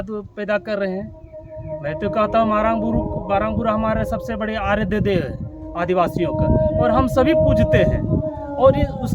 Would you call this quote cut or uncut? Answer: uncut